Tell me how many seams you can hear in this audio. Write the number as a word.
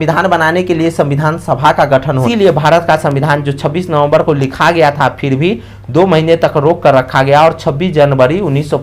one